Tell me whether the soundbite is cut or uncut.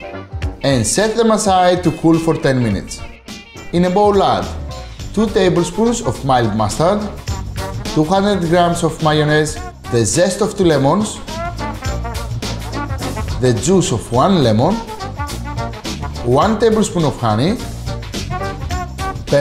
cut